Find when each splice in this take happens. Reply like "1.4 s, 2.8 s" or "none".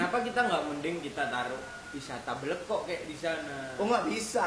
none